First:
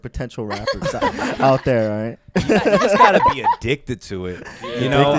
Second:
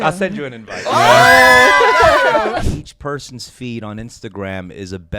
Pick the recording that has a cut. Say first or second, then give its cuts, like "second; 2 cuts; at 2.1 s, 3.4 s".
second; 1 cut; at 2.5 s